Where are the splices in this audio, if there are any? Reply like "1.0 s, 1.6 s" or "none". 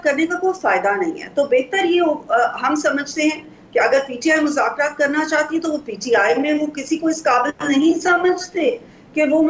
none

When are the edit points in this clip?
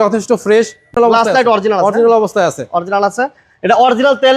1.0 s

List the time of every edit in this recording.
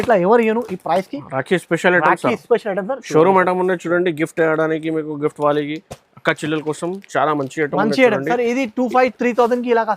none

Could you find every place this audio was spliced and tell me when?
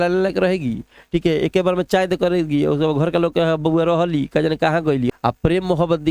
5.1 s

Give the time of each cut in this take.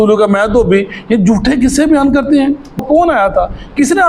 2.8 s

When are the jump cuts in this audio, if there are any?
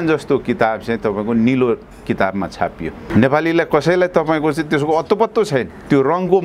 none

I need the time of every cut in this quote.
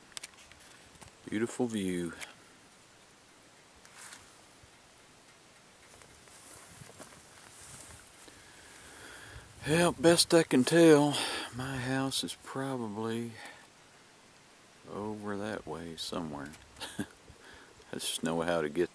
none

